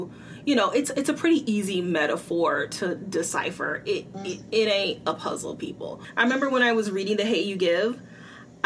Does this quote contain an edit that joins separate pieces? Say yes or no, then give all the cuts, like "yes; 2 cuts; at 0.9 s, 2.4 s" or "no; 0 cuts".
yes; 1 cut; at 6.0 s